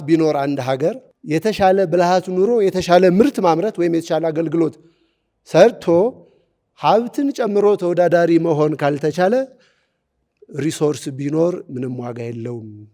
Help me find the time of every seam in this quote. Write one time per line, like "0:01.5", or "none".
0:01.1

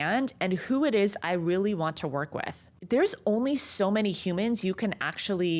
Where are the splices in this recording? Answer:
0:02.7

